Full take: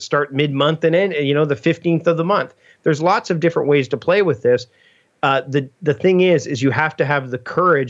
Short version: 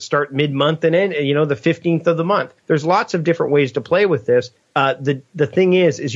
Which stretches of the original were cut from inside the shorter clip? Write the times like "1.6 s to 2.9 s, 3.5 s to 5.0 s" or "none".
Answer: 2.5 s to 2.7 s, 4.8 s to 5.1 s